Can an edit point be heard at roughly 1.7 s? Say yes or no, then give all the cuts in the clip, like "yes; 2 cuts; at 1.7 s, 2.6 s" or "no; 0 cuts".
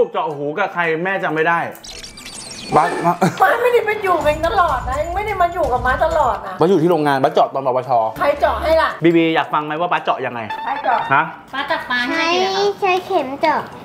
no; 0 cuts